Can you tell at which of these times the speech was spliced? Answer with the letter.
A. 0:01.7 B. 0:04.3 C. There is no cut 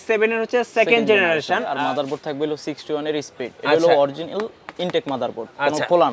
A